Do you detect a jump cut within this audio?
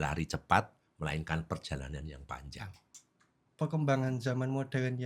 yes; 1 cut; at 3.4 s

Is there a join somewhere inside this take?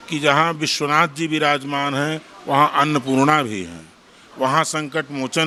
no; 0 cuts

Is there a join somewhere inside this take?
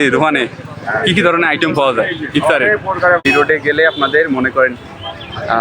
yes; 1 cut; at 3.2 s

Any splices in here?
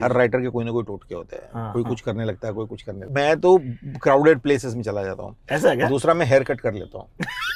yes; 1 cut; at 3.0 s

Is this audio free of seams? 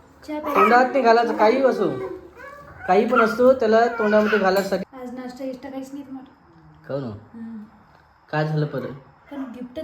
no; 1 cut; at 4.9 s

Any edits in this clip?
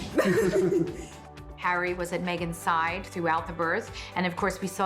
yes; 1 cut; at 1.4 s

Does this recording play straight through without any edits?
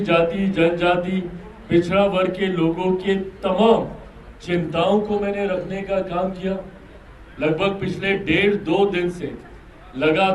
yes; 0 cuts

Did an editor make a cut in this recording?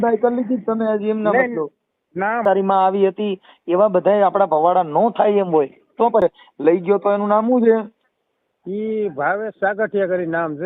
yes; 2 cuts; at 2.4 s, 6.2 s

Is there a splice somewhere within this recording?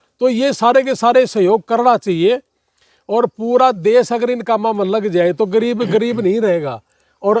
no; 0 cuts

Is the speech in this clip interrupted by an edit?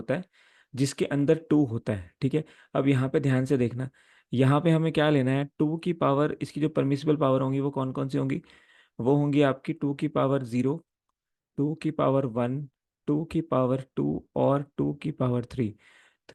no; 0 cuts

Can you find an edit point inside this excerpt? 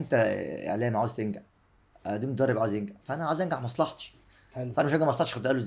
no; 0 cuts

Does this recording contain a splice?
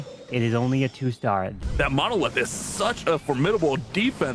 yes; 1 cut; at 1.6 s

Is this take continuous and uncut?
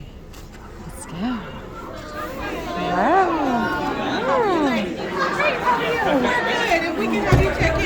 yes; 0 cuts

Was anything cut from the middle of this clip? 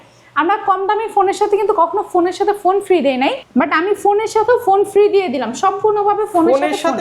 yes; 1 cut; at 3.4 s

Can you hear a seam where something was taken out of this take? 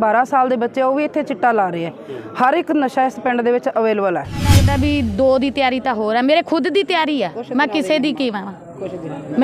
yes; 1 cut; at 4.6 s

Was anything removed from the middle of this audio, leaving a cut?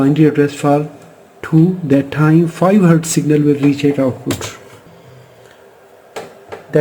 yes; 1 cut; at 4.9 s

